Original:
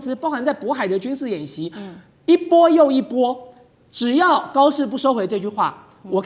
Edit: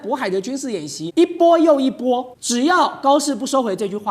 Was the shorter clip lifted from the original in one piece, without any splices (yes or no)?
no